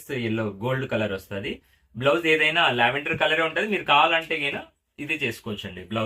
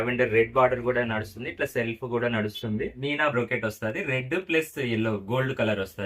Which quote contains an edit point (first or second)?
second